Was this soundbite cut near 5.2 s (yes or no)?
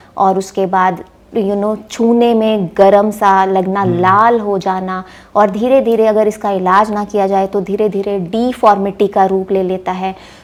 no